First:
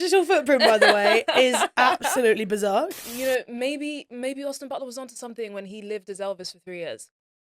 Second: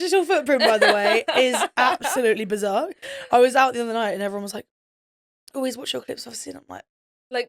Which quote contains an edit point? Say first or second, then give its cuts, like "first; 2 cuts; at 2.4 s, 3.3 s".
first; 1 cut; at 3.0 s